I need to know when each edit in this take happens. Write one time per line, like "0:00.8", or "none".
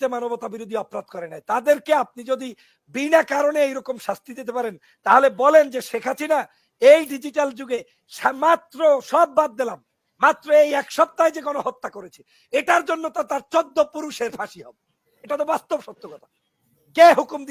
none

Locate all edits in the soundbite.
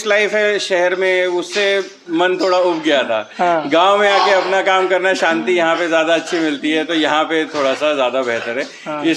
none

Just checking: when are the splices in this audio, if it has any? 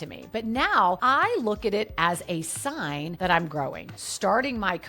0:01.0
0:03.9

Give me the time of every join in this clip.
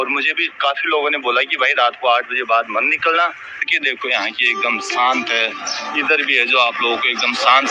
0:03.7

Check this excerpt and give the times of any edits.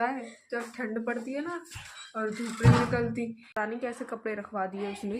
0:03.5

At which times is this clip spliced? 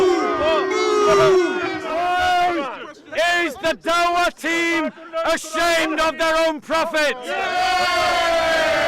0:01.9

